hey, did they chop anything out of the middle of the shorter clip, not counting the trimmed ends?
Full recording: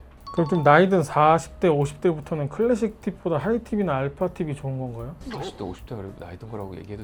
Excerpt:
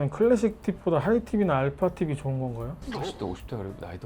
no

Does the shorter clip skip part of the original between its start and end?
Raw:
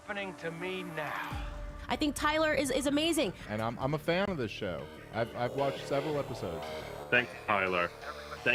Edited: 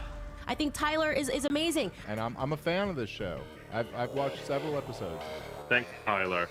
no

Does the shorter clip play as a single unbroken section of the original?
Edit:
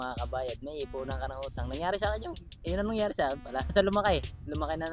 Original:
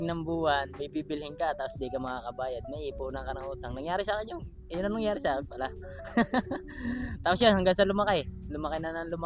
no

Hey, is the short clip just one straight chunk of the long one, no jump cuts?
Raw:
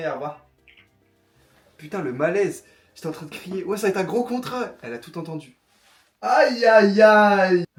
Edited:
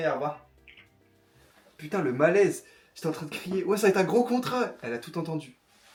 yes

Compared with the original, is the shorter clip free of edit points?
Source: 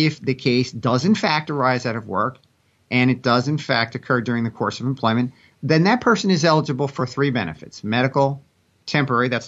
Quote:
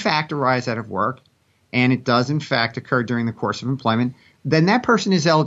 yes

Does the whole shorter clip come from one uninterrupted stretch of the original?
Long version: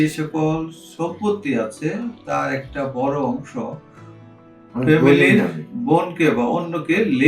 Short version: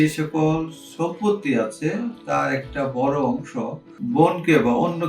no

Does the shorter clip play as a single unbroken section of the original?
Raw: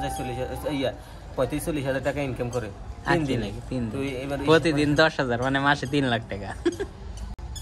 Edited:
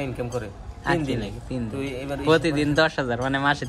yes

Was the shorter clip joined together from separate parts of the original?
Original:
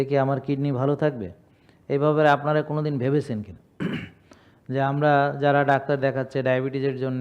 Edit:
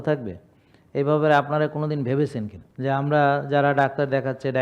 yes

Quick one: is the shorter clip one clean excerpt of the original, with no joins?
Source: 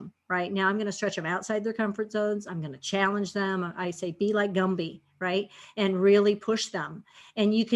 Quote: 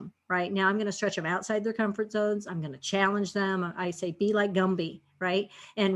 yes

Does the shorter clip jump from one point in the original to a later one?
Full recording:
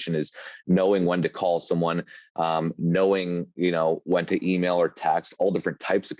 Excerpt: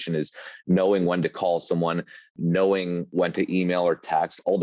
yes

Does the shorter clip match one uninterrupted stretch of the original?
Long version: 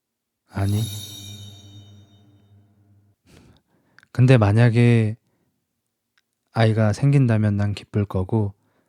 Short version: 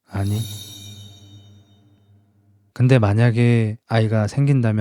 no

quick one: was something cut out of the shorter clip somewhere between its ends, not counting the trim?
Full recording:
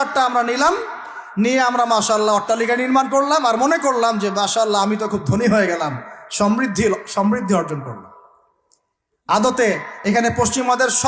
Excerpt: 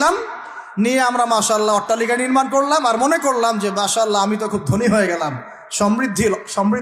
no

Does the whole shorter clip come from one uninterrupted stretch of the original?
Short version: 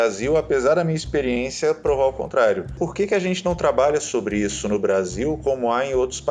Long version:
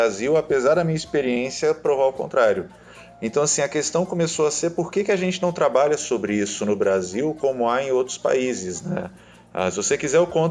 no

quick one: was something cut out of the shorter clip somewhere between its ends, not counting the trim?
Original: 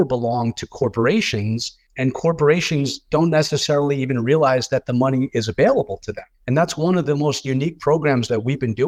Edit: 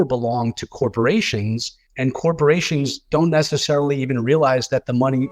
no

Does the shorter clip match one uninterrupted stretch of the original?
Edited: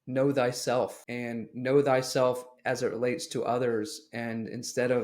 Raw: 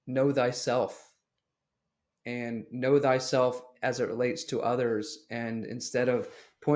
no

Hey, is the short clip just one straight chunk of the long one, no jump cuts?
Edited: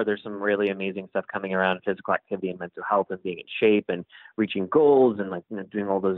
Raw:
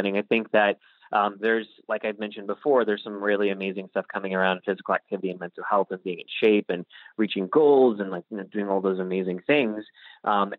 yes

